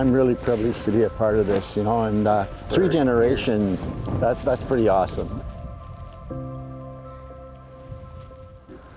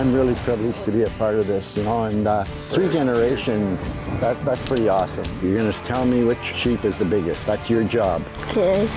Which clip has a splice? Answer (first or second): second